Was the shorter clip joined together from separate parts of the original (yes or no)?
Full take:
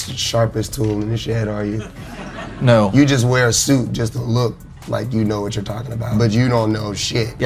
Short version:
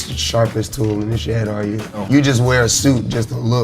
yes